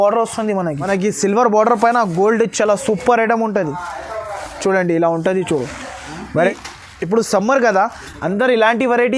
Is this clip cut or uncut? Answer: cut